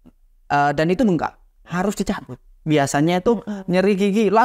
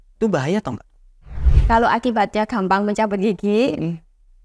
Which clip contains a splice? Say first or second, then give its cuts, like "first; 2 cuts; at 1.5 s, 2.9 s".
second; 1 cut; at 1.4 s